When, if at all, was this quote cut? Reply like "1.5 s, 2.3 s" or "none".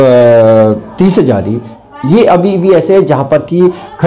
none

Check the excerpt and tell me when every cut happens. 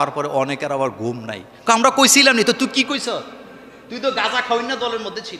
none

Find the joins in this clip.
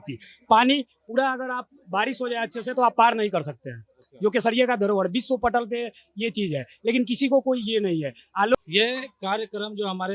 8.5 s

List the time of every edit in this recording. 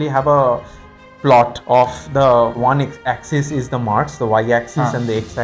2.6 s

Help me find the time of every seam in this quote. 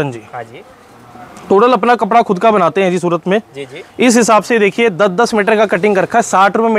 none

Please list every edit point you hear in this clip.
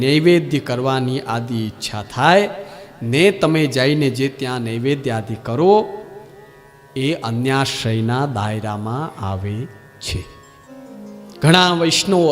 10.6 s

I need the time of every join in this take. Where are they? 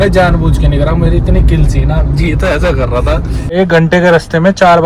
3.5 s

